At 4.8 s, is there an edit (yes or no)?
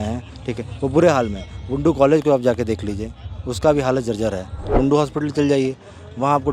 yes